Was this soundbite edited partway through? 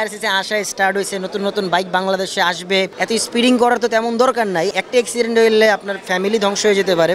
yes; 2 cuts; at 3.0 s, 4.7 s

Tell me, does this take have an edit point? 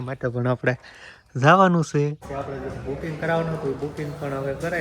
yes; 1 cut; at 2.3 s

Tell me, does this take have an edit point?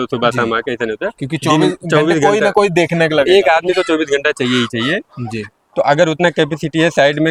no; 0 cuts

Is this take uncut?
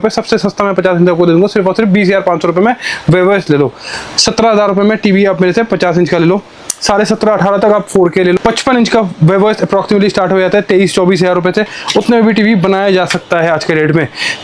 yes; 0 cuts

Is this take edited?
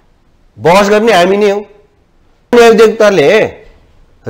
yes; 1 cut; at 2.5 s

